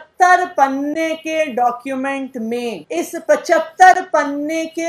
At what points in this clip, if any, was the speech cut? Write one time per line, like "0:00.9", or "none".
0:02.8